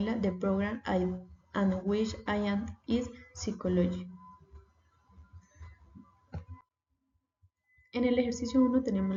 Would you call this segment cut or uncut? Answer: uncut